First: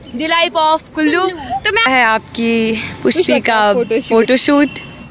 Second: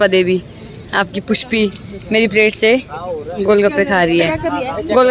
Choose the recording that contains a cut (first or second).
first